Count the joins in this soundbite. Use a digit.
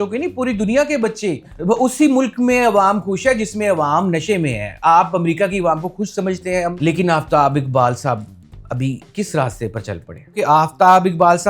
3